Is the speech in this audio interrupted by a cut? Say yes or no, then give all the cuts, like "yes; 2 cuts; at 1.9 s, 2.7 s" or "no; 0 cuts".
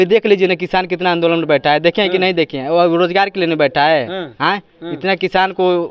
no; 0 cuts